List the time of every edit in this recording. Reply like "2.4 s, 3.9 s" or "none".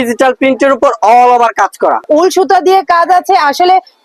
2.0 s